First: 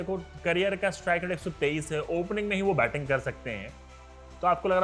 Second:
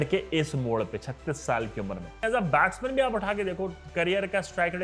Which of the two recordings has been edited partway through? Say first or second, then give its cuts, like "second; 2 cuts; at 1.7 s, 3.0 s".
second; 1 cut; at 2.2 s